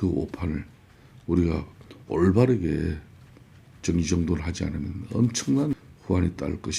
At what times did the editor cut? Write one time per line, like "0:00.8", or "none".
0:05.7